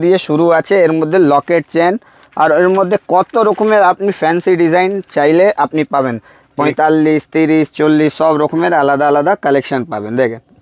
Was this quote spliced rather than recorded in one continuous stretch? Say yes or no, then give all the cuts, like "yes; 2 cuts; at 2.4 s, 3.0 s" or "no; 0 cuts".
no; 0 cuts